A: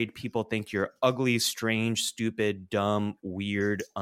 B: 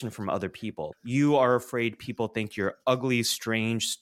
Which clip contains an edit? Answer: B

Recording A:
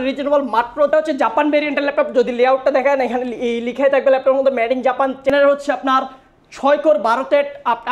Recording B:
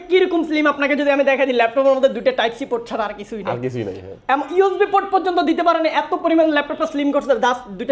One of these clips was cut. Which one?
A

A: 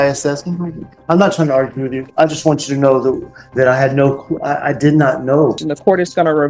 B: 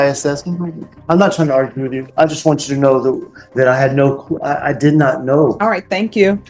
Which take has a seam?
A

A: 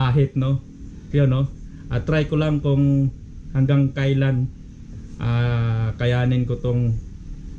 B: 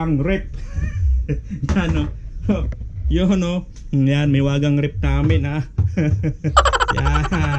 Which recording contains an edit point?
B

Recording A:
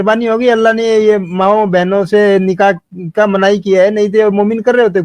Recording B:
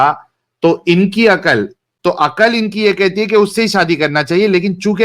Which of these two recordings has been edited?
B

